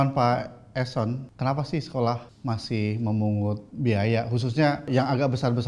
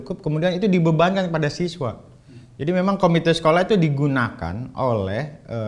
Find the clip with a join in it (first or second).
first